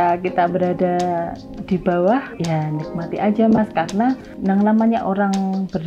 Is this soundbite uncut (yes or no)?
no